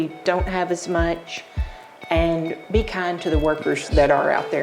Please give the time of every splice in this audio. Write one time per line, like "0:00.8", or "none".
0:02.6